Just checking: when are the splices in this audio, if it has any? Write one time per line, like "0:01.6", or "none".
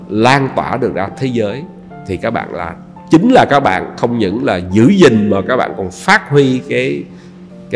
none